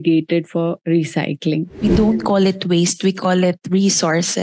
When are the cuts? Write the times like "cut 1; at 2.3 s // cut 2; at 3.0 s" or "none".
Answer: cut 1; at 1.8 s